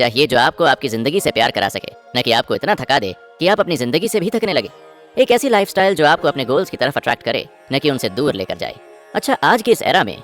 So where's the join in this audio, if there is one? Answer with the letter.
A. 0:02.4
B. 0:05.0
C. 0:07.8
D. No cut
D